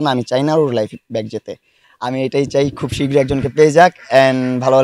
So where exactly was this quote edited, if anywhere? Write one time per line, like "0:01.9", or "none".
0:01.9